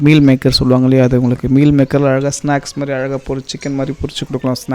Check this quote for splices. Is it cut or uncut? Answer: uncut